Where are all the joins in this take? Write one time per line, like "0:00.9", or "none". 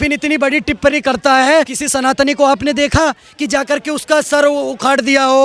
0:01.8